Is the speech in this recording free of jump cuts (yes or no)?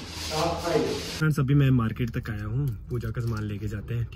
no